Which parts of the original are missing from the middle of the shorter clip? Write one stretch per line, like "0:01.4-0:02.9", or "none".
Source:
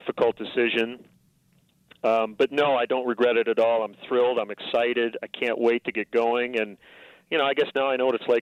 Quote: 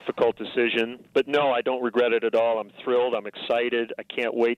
0:01.1-0:02.3